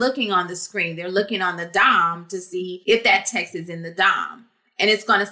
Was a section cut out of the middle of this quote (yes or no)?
yes